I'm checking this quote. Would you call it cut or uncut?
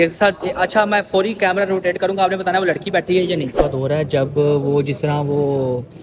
cut